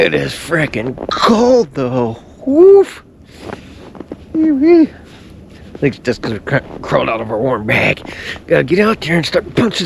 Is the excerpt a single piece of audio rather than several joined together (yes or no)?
yes